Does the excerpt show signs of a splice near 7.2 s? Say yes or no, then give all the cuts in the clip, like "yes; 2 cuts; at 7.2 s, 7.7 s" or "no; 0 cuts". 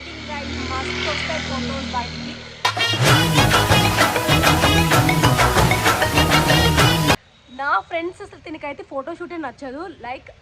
yes; 1 cut; at 7.2 s